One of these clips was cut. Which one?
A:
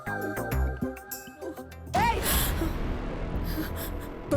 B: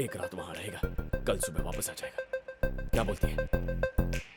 A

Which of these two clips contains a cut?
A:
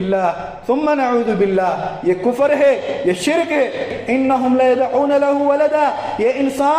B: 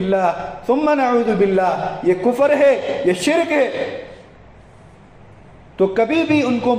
A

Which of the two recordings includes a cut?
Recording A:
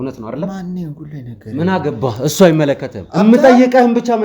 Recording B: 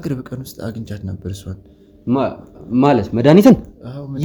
A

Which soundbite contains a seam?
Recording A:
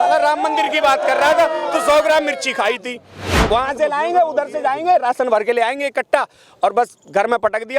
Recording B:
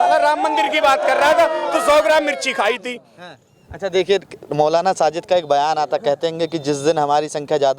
A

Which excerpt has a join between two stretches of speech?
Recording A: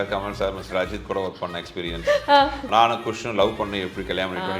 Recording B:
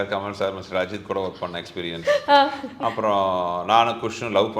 A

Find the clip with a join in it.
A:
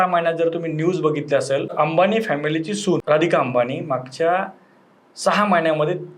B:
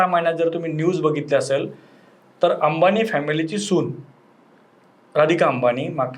A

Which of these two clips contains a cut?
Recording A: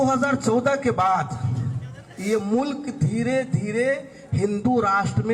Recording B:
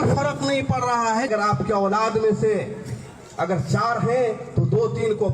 B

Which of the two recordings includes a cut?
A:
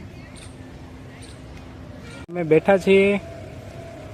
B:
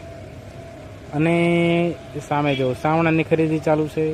A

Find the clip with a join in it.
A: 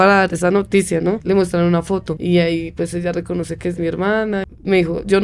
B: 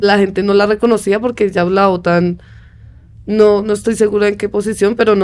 A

